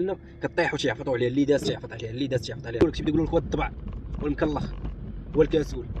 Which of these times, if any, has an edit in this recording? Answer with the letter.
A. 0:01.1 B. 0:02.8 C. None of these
B